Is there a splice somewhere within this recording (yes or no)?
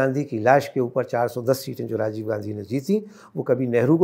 no